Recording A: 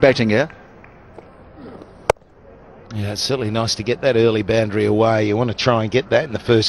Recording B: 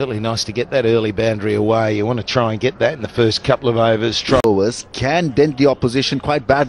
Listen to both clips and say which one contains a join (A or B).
B